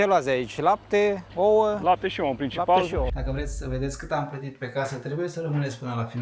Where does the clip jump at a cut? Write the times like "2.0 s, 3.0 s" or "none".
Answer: 1.2 s, 3.1 s

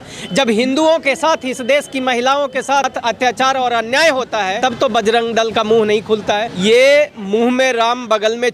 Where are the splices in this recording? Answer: 2.9 s, 4.5 s, 6.5 s

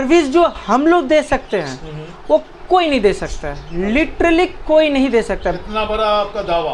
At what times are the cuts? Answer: none

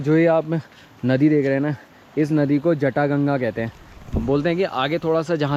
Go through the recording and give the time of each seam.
none

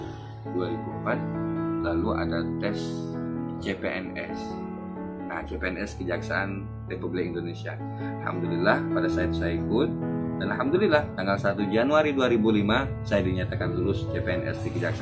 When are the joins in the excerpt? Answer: none

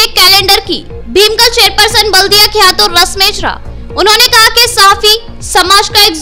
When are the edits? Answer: none

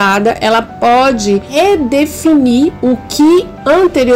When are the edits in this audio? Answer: 1.5 s

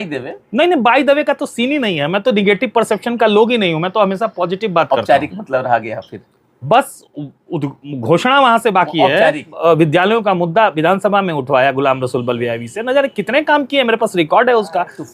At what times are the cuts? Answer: 9.5 s

